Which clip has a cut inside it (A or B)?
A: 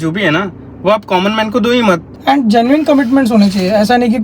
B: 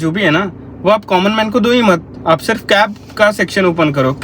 A